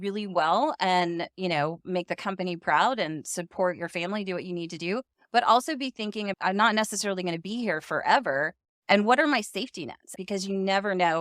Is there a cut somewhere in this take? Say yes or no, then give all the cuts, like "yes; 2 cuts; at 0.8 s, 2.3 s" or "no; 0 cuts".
yes; 2 cuts; at 6.3 s, 10.1 s